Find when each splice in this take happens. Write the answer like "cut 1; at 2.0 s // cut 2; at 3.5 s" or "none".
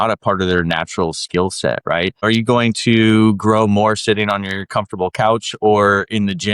cut 1; at 2.2 s

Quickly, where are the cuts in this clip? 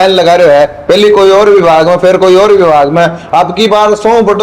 none

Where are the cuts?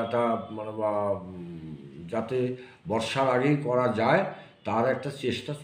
none

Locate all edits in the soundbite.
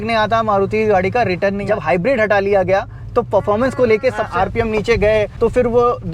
cut 1; at 1.6 s // cut 2; at 4.3 s // cut 3; at 5.3 s

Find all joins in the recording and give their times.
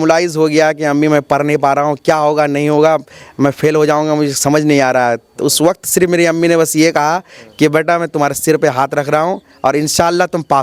none

